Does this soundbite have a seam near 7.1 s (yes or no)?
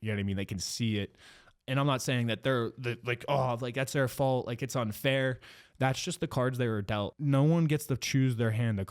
yes